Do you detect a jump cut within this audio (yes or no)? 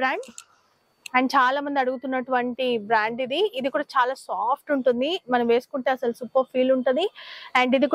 no